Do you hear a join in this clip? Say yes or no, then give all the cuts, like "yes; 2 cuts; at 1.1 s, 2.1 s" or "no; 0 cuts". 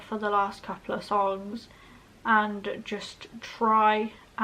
no; 0 cuts